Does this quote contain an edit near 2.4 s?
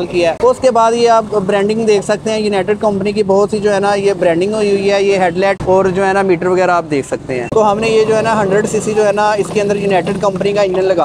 no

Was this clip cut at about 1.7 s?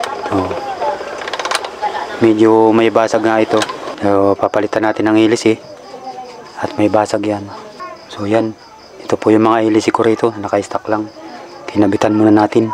no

